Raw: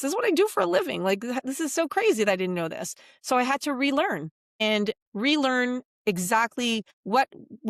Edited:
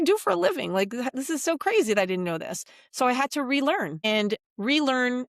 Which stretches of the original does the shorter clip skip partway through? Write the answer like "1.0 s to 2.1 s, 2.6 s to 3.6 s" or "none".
4.2 s to 4.5 s